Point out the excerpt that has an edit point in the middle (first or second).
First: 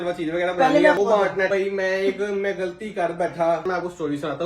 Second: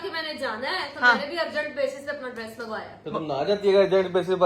first